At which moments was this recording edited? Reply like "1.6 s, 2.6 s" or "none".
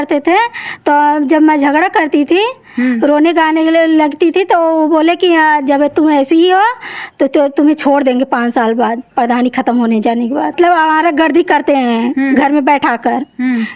10.5 s